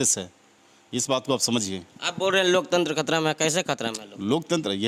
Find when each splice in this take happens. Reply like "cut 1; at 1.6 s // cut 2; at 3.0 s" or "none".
none